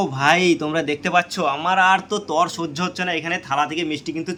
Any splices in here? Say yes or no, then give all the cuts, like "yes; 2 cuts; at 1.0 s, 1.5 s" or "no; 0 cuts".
no; 0 cuts